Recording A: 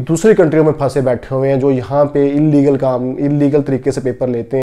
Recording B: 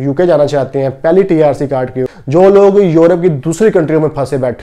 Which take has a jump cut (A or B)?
B